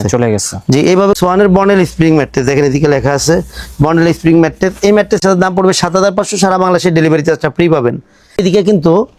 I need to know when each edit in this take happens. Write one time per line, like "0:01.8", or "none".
0:01.2
0:05.2
0:08.4